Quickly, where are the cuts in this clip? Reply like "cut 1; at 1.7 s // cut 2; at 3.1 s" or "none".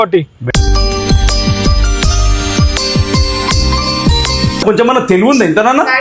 cut 1; at 4.6 s